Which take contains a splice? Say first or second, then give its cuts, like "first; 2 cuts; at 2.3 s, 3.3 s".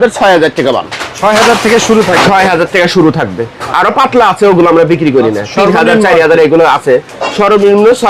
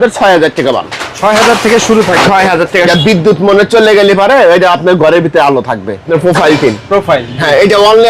second; 2 cuts; at 2.9 s, 6.1 s